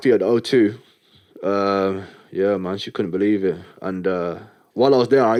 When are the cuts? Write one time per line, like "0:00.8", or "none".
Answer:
none